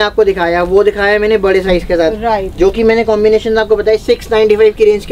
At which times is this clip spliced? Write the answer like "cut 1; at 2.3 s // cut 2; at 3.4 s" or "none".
none